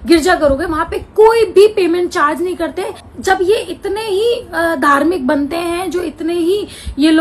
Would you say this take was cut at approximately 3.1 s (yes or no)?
yes